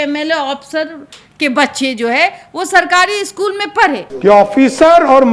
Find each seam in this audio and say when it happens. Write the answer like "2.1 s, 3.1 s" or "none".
4.1 s